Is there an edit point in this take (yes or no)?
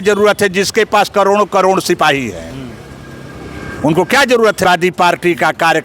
yes